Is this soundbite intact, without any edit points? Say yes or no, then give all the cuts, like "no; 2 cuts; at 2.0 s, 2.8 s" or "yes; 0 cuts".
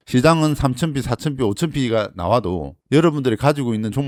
yes; 0 cuts